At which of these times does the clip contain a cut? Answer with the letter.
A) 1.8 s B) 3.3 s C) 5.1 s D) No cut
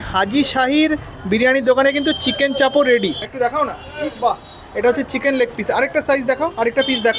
B